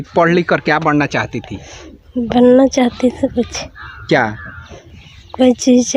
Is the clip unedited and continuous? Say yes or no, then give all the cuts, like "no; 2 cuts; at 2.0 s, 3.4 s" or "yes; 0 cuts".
yes; 0 cuts